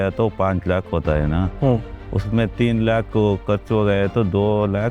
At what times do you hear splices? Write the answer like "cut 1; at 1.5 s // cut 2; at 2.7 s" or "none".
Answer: none